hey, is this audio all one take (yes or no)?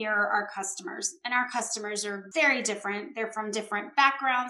no